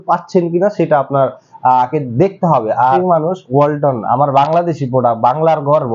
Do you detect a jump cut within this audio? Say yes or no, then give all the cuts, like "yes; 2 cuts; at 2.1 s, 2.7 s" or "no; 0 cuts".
yes; 1 cut; at 3.0 s